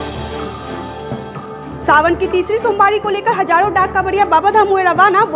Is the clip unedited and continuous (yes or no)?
no